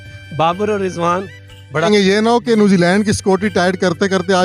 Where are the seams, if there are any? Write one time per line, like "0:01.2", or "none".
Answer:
0:01.9

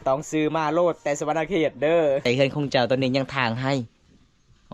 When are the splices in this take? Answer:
0:02.2

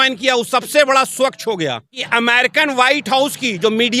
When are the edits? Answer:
0:02.0

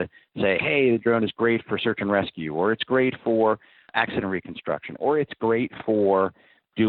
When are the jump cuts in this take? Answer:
0:03.9

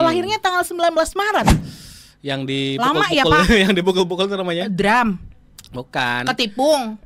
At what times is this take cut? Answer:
0:01.6

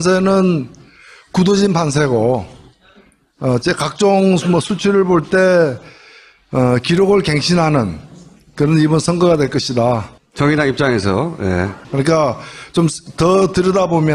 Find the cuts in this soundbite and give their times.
0:06.1

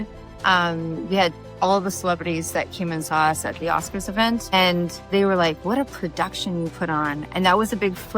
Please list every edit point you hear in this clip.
0:04.5
0:07.2

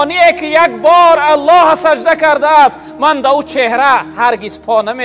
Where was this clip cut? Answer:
none

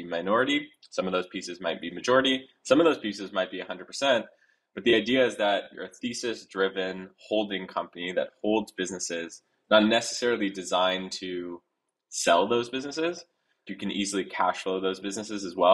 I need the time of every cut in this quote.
0:05.8
0:13.7

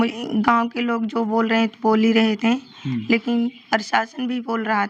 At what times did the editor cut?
none

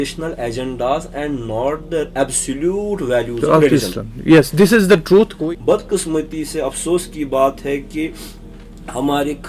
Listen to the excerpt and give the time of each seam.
0:05.3

